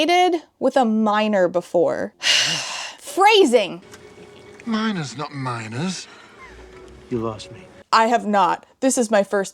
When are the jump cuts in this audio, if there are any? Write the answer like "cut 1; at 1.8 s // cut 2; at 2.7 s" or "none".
none